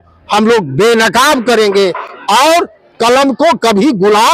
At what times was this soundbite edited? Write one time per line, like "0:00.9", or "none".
none